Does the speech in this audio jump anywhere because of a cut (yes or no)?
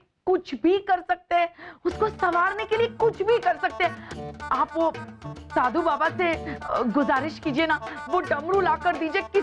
no